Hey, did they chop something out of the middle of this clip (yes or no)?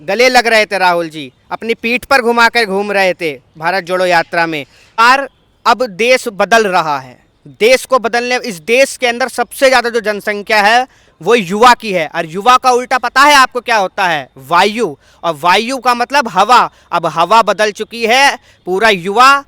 yes